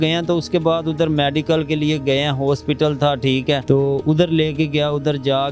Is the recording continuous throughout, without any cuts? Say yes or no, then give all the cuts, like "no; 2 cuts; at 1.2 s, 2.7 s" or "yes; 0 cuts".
no; 1 cut; at 3.6 s